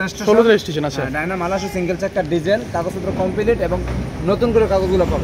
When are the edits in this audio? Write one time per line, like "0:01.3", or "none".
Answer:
none